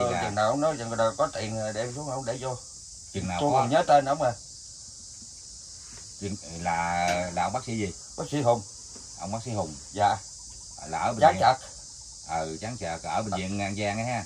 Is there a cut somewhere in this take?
no; 0 cuts

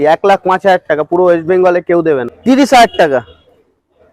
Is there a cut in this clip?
yes; 1 cut; at 2.3 s

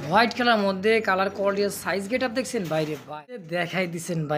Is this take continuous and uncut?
no; 1 cut; at 3.5 s

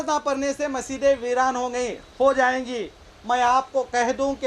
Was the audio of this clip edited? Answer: no; 0 cuts

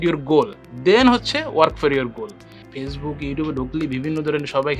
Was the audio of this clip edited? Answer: yes; 1 cut; at 2.6 s

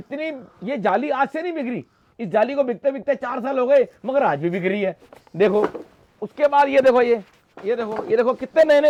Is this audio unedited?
yes; 0 cuts

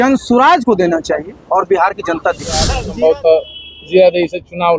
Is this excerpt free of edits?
no; 1 cut; at 2.8 s

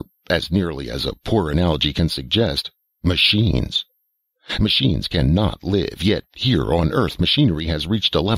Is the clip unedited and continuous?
no; 1 cut; at 3.8 s

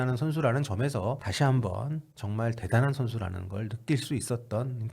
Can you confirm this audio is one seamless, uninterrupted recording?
no; 1 cut; at 1.3 s

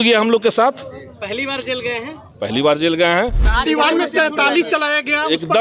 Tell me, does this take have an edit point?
yes; 1 cut; at 3.5 s

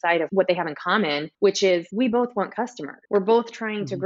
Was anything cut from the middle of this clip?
no; 0 cuts

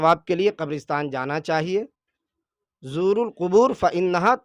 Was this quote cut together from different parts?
no; 0 cuts

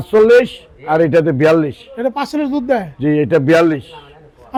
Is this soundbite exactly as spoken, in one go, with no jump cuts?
yes; 0 cuts

